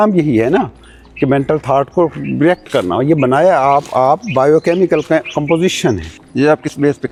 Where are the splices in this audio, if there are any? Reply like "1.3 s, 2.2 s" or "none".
none